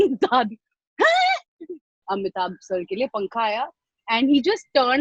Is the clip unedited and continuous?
no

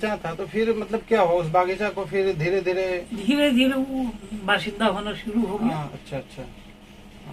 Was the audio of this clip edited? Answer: no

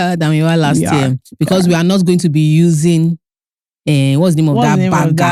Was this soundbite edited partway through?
no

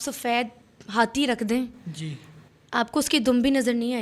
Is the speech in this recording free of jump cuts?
yes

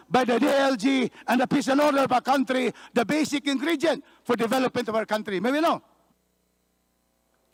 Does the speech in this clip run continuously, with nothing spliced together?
yes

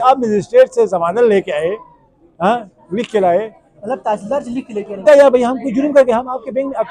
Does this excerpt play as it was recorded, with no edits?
yes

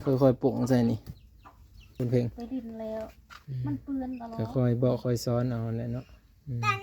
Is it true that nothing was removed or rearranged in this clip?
no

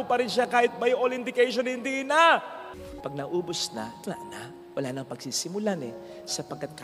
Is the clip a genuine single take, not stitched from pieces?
no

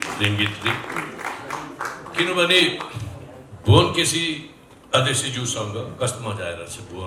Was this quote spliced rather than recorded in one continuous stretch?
no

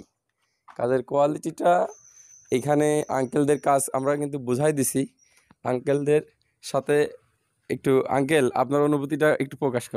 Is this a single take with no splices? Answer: yes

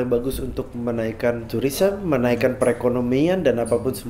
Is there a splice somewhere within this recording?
yes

